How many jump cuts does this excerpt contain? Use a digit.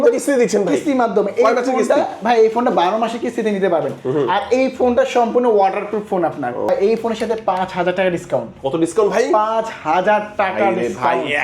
1